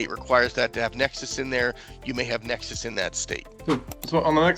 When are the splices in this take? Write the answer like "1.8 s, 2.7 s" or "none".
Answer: none